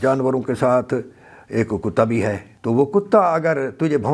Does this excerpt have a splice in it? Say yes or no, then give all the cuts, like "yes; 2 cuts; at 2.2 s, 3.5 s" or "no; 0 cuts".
yes; 1 cut; at 2.5 s